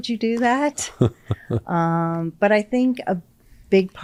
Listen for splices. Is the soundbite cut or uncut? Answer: uncut